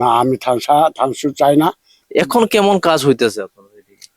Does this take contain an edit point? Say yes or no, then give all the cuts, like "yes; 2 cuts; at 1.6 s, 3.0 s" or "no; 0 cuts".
yes; 1 cut; at 1.9 s